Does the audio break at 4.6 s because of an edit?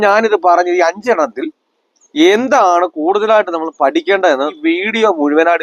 yes; 1 cut; at 4.6 s

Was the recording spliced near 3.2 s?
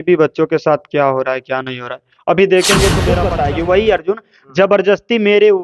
yes; 1 cut; at 3.2 s

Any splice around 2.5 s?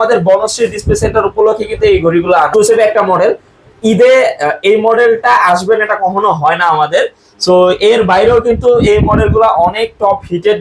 yes; 1 cut; at 2.5 s

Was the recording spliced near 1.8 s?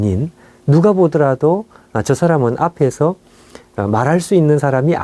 no; 0 cuts

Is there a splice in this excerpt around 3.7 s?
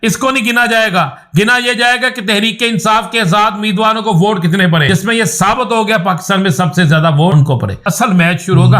no; 2 cuts; at 4.9 s, 7.7 s

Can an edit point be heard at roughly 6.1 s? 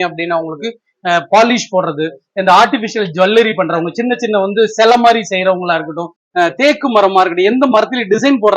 yes; 1 cut; at 6.1 s

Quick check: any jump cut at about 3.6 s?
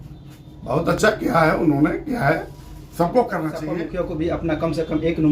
yes; 1 cut; at 3.6 s

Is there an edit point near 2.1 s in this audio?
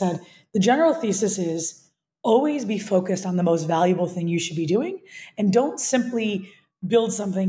no; 0 cuts

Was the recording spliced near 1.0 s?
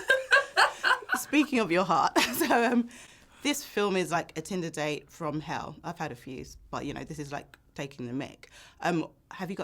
no; 0 cuts

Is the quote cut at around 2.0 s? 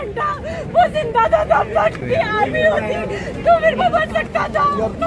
yes; 1 cut; at 2.0 s

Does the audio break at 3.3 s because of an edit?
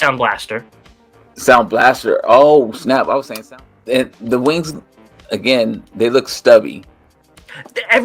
yes; 1 cut; at 3.3 s

